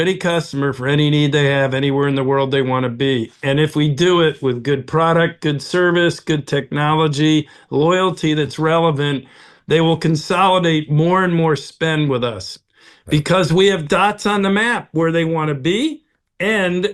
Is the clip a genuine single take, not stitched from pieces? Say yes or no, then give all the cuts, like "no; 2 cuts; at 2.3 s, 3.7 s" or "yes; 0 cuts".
yes; 0 cuts